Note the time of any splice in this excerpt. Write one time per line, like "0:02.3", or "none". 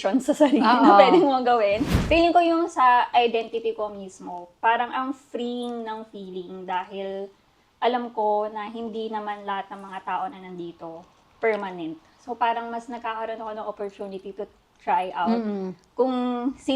0:01.9

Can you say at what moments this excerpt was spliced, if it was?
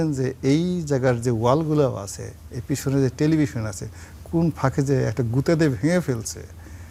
none

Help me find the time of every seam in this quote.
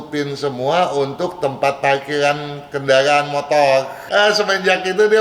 0:04.0

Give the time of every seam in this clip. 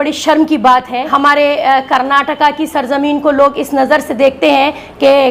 0:01.1

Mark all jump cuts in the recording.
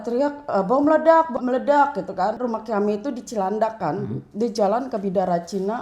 0:01.3
0:02.4

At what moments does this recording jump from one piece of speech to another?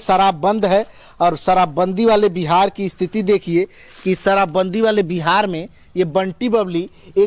none

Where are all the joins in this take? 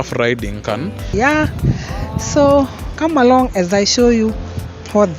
0:01.1

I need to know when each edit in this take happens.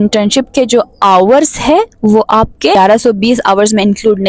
0:02.8

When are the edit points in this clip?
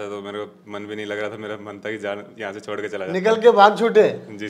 none

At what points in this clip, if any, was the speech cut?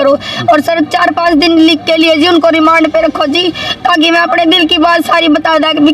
none

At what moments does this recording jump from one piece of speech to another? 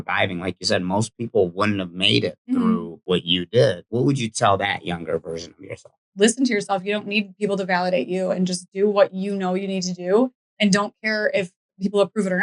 0:03.0
0:03.8
0:06.1

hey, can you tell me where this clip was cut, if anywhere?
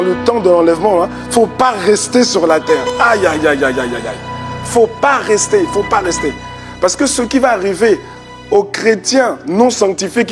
none

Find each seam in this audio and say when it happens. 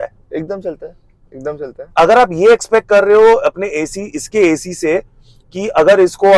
none

